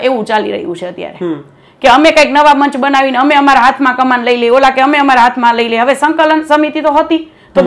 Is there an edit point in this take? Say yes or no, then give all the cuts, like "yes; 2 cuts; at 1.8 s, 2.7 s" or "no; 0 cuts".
no; 0 cuts